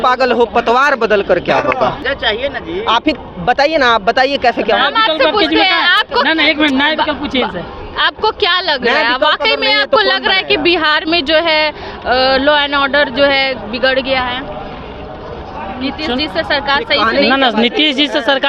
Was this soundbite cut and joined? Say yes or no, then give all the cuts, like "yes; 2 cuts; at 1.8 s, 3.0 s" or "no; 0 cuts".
no; 0 cuts